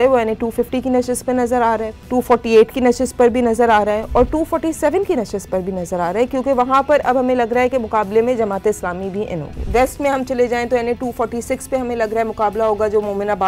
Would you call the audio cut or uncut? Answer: cut